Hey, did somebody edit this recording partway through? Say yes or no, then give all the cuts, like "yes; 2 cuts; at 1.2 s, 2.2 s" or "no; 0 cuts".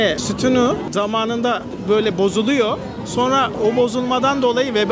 no; 0 cuts